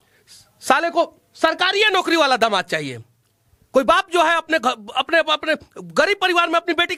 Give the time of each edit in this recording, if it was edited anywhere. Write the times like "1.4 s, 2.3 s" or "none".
none

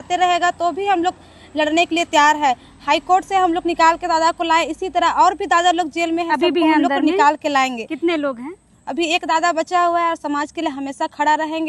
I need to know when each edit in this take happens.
none

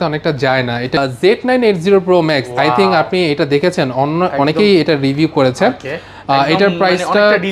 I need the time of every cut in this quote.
1.0 s

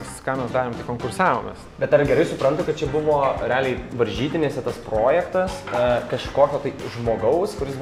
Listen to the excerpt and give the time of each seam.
1.6 s

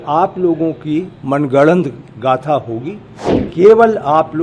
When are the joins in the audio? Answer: 3.4 s

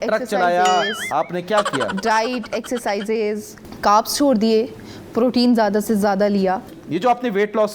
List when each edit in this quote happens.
3.5 s, 6.7 s

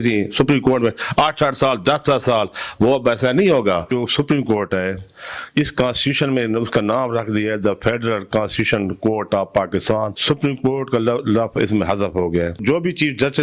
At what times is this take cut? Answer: 3.9 s, 10.2 s, 12.6 s

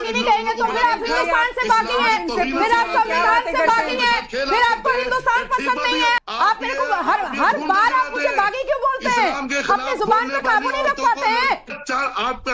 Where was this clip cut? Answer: 6.2 s, 11.7 s

